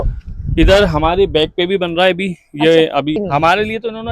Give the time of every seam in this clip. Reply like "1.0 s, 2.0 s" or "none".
3.2 s